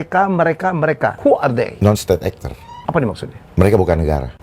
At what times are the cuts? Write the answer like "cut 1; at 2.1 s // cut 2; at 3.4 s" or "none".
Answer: cut 1; at 1.3 s // cut 2; at 2.6 s